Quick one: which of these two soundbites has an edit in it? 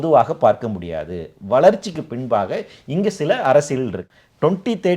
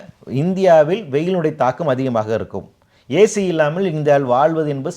first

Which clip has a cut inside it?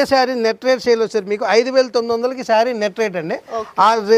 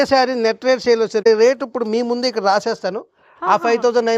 second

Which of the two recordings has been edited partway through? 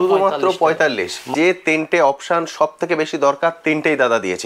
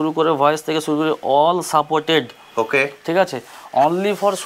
first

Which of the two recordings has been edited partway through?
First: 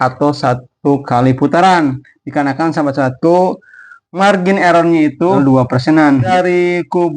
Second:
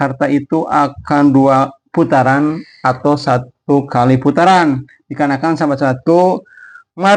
first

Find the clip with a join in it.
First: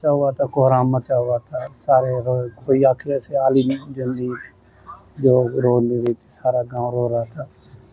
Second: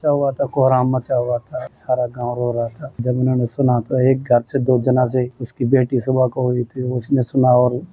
second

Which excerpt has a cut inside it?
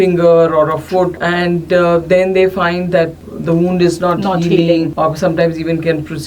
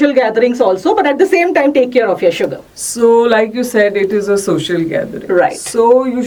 first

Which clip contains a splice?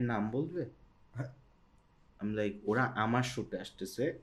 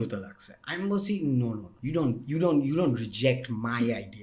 second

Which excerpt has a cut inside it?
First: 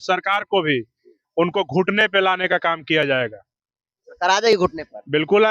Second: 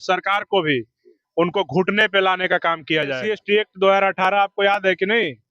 second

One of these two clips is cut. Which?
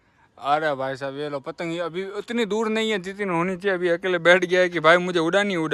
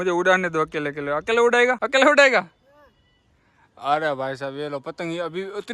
second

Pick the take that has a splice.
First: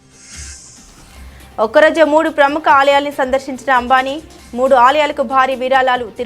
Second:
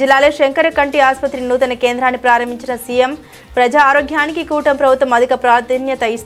first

